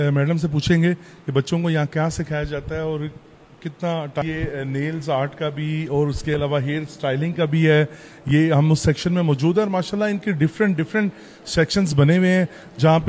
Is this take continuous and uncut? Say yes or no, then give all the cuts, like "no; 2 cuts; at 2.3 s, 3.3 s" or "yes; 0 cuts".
no; 1 cut; at 4.2 s